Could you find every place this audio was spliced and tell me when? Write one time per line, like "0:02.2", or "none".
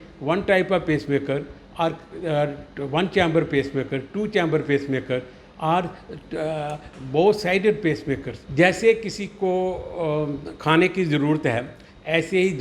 0:08.4

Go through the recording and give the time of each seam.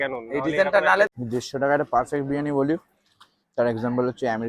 0:01.1

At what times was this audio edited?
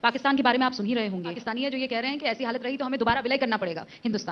0:01.5

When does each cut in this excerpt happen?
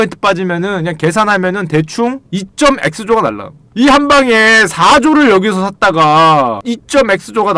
0:02.3
0:06.7

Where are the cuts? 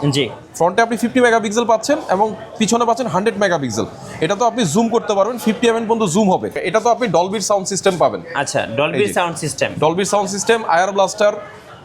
0:06.6

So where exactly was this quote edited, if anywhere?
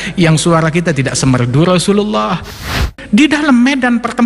0:02.5

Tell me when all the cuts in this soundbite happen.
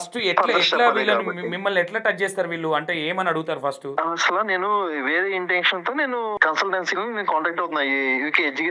0:03.9
0:06.3

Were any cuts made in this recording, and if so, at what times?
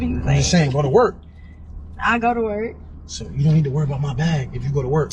none

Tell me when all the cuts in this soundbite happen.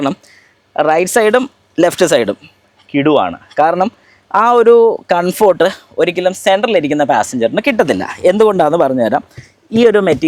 none

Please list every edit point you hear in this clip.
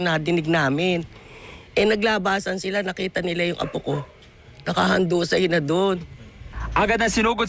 0:04.8

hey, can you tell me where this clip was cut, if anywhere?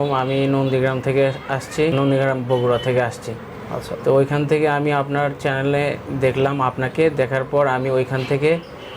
0:01.9

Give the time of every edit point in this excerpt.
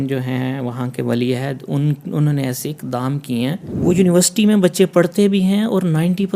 0:03.7

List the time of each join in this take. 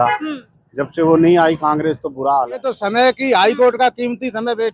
0:02.7

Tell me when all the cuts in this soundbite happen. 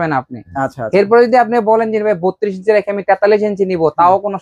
none

